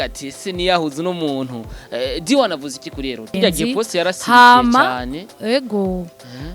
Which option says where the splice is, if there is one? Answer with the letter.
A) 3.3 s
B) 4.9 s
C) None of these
A